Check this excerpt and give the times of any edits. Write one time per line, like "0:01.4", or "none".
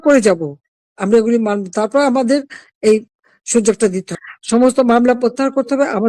0:04.1